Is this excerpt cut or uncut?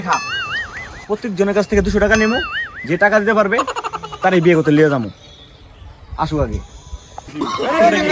uncut